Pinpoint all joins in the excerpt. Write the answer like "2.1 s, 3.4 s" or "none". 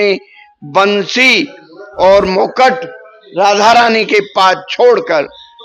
none